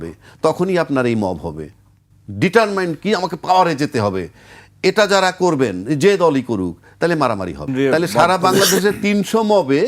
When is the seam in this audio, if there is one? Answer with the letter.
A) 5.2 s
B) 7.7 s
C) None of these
B